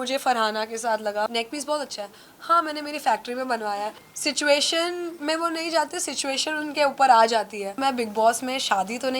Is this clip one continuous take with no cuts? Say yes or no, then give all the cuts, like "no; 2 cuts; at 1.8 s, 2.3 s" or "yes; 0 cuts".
no; 3 cuts; at 1.3 s, 4.0 s, 7.8 s